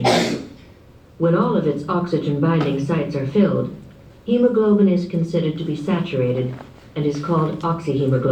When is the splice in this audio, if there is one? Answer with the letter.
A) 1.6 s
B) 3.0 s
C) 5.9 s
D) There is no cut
D